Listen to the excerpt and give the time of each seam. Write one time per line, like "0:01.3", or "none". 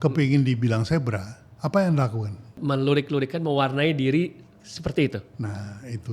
0:02.5
0:05.3